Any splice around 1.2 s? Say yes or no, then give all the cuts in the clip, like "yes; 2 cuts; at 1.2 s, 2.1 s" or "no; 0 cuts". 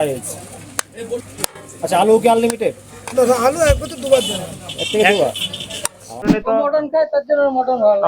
yes; 2 cuts; at 1.2 s, 6.3 s